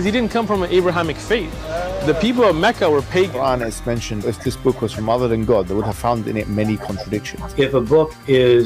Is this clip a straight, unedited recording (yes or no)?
no